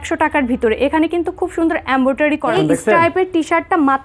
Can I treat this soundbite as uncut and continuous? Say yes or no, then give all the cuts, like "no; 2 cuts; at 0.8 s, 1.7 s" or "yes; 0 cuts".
no; 1 cut; at 2.5 s